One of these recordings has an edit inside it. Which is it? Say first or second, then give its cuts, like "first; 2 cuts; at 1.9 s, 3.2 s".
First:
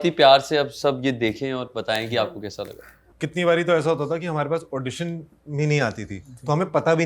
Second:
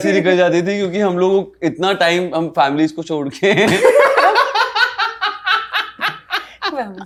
first; 1 cut; at 3.2 s